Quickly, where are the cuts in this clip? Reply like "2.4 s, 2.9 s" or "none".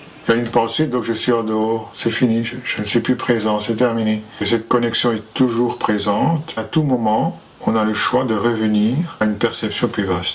4.3 s, 6.6 s, 9.2 s

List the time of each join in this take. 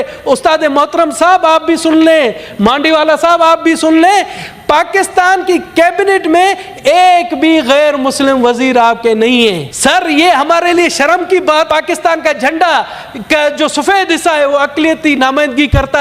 9.7 s, 11.7 s

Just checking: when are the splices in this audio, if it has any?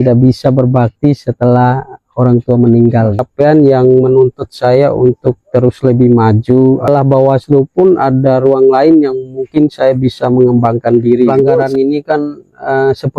3.3 s, 6.9 s, 11.3 s

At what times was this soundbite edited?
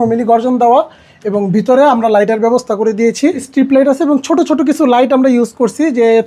3.4 s

